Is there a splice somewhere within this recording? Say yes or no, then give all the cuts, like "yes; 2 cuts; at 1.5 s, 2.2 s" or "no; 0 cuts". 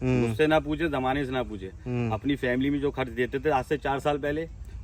no; 0 cuts